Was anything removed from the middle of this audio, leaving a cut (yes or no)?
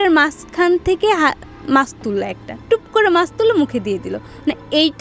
no